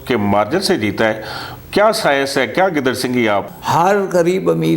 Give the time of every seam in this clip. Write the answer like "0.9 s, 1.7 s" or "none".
3.4 s

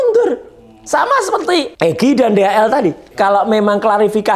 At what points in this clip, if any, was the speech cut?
1.7 s, 3.1 s

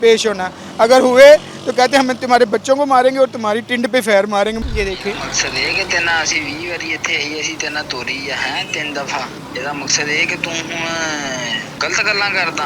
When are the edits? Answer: 4.6 s, 9.4 s, 11.7 s

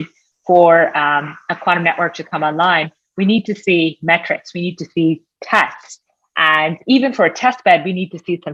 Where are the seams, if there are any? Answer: none

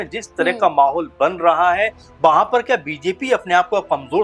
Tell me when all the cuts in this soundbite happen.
none

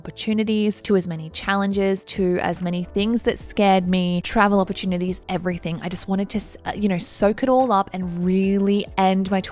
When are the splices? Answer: none

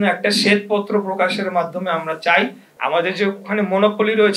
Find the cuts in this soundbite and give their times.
2.7 s

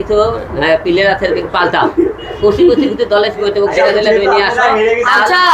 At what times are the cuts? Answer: none

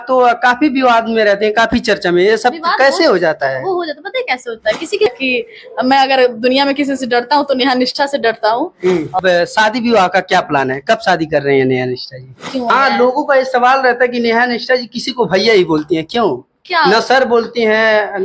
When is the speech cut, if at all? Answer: 5.1 s, 9.2 s, 12.7 s

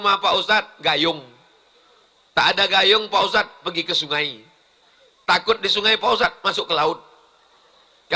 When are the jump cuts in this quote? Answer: none

